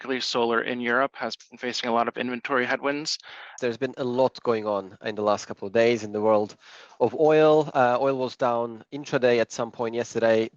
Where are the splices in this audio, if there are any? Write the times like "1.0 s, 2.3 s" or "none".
3.6 s